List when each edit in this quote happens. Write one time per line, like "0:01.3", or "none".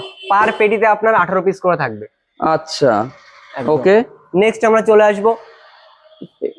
none